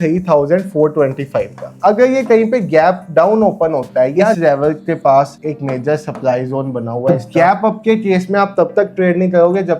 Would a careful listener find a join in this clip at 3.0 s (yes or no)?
no